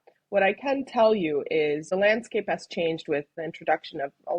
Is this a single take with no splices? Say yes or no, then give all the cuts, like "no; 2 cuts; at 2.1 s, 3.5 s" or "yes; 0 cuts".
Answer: no; 2 cuts; at 1.9 s, 3.3 s